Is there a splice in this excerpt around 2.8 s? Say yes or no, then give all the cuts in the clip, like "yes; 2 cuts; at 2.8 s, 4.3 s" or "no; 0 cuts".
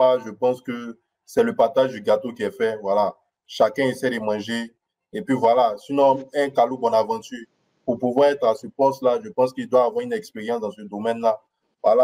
no; 0 cuts